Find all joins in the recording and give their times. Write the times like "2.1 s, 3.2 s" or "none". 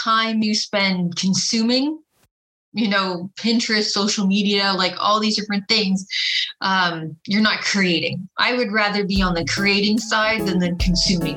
none